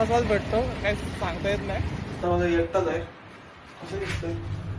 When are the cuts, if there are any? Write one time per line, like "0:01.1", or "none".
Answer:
0:02.1